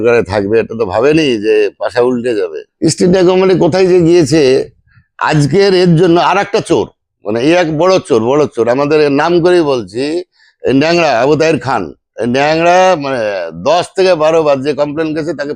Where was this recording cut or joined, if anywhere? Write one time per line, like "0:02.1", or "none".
0:02.6